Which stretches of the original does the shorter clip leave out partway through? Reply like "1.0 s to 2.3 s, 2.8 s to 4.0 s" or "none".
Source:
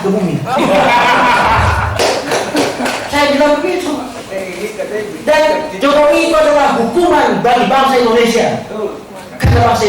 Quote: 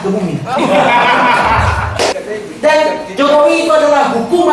2.2 s to 4.8 s